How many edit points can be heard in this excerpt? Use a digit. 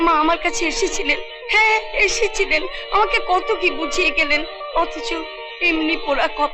0